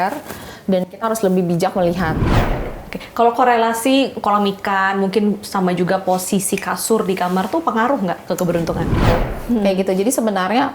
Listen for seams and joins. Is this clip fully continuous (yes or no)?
no